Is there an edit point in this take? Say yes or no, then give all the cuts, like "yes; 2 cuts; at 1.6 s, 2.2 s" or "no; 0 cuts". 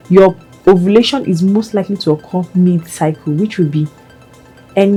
no; 0 cuts